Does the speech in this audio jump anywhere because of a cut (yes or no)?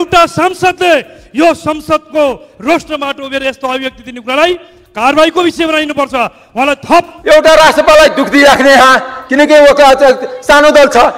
yes